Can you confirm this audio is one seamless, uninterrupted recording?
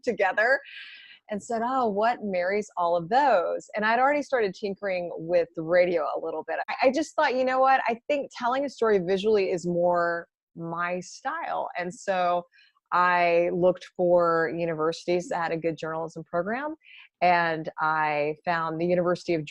no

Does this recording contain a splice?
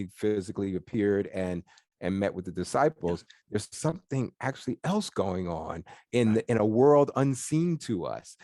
no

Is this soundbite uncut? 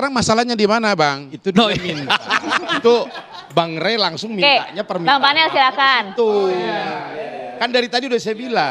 yes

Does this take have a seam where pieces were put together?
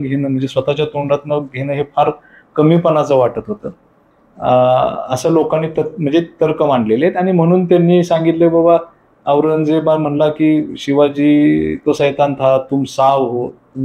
no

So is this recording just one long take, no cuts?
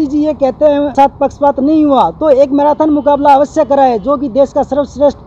no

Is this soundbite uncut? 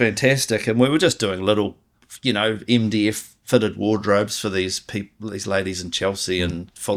yes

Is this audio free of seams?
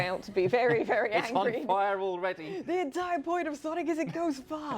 yes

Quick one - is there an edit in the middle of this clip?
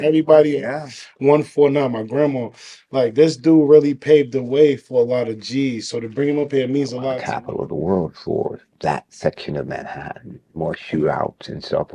yes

